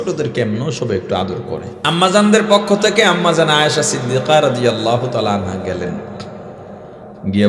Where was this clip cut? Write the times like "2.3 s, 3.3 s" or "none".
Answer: 1.7 s

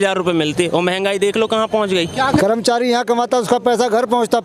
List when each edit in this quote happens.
2.1 s

